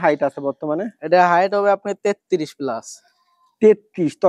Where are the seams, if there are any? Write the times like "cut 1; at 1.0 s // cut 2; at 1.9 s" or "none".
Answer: none